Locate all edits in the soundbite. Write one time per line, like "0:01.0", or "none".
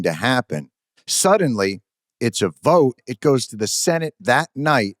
0:03.1